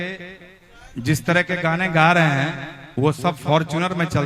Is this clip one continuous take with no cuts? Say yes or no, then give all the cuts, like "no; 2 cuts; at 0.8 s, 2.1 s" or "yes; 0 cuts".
yes; 0 cuts